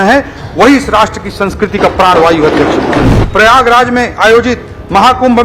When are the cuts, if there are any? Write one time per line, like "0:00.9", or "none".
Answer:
0:03.2

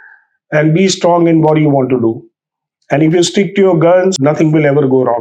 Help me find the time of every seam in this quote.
0:04.1

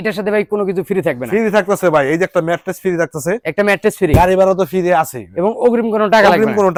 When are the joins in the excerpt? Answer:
none

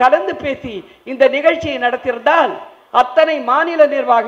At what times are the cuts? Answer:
none

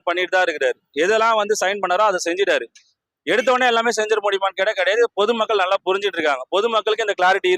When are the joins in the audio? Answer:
none

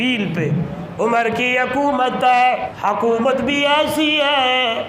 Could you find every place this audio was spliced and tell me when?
0:02.7

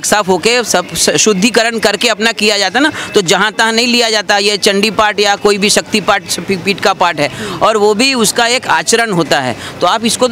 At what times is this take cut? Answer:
none

